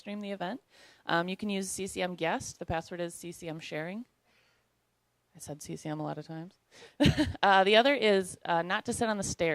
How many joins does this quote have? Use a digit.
1